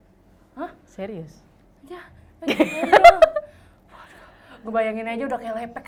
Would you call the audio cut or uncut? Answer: uncut